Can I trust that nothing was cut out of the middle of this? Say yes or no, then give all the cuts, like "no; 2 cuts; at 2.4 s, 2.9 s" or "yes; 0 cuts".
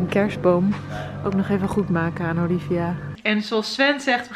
no; 1 cut; at 3.1 s